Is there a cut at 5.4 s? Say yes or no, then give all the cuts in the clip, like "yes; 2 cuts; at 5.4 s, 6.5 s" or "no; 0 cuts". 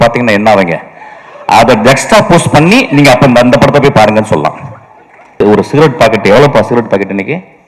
yes; 1 cut; at 5.4 s